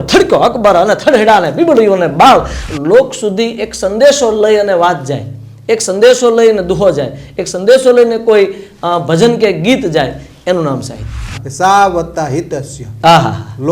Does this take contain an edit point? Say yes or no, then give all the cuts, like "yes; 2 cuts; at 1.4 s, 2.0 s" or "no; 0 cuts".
yes; 2 cuts; at 2.6 s, 11.4 s